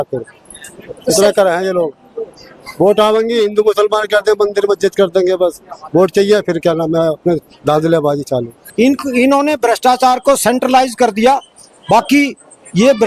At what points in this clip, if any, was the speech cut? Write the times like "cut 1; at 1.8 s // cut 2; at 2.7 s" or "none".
cut 1; at 8.6 s